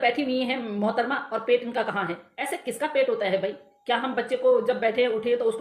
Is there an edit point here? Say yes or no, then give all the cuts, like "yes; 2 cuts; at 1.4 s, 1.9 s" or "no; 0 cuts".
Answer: yes; 1 cut; at 2.3 s